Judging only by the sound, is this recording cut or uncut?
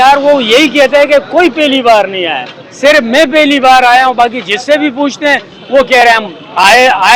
uncut